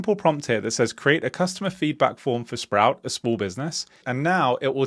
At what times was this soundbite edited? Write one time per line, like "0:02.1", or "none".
0:04.0